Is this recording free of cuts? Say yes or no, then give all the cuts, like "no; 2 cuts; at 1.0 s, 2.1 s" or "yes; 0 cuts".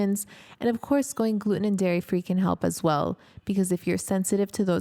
yes; 0 cuts